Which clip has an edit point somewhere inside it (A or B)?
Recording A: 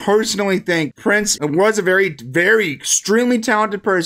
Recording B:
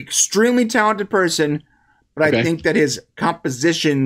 A